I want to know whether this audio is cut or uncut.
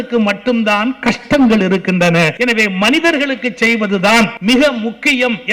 cut